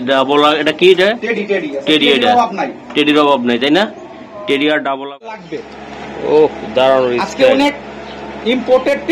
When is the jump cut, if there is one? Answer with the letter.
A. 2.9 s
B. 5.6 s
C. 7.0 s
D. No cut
B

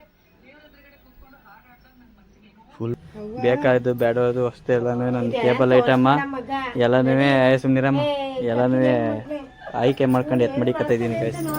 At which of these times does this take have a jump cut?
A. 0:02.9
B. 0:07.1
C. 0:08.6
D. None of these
A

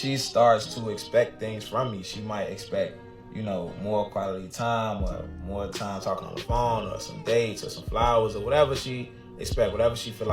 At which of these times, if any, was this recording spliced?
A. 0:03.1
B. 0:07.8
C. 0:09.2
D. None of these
A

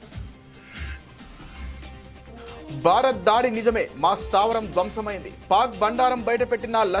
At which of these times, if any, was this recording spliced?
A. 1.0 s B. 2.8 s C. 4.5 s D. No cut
B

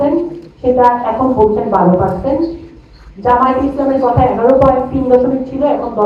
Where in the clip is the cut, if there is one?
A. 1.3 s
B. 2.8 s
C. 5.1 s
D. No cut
D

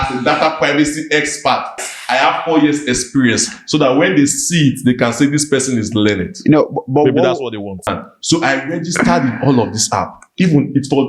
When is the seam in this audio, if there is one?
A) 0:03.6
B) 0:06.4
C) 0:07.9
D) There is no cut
C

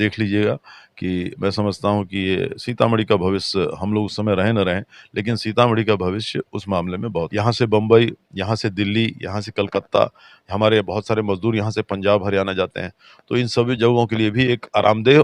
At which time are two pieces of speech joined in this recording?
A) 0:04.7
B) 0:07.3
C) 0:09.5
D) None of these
B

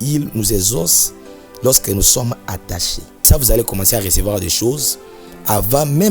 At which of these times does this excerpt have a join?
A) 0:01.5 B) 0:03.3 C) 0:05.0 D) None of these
B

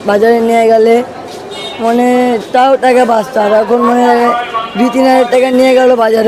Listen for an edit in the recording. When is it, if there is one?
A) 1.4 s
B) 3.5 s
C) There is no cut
C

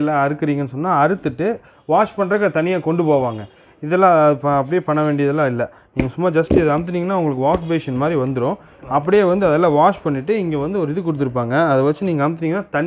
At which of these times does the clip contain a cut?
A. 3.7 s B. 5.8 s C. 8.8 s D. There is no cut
D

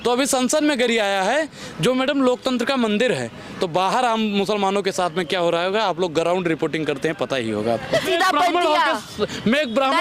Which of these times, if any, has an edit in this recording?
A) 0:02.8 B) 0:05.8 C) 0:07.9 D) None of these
C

